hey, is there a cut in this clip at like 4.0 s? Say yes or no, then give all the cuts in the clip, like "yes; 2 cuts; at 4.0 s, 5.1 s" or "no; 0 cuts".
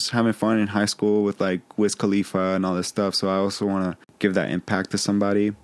yes; 1 cut; at 4.0 s